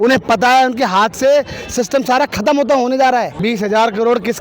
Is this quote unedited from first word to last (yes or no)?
no